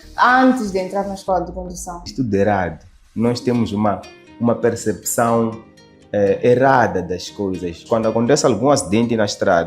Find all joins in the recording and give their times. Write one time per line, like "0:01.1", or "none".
0:02.1
0:07.8